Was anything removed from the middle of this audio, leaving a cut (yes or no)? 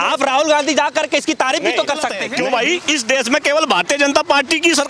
yes